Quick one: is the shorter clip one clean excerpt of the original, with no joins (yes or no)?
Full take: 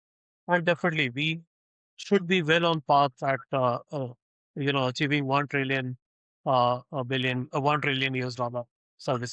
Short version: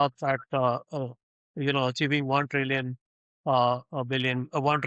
yes